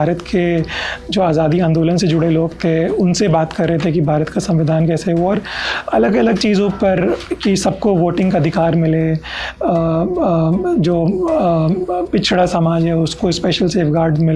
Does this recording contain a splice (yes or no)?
no